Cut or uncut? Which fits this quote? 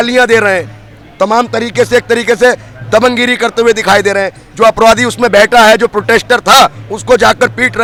uncut